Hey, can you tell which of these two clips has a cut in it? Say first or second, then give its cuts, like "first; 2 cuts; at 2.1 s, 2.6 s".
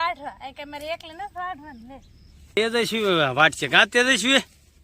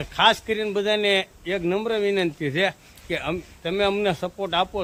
first; 1 cut; at 2.6 s